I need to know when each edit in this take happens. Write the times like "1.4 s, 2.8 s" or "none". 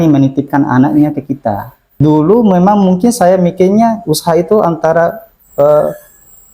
2.0 s